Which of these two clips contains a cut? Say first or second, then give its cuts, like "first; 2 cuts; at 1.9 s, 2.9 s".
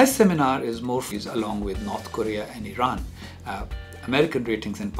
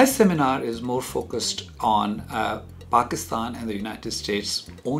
second; 1 cut; at 1.1 s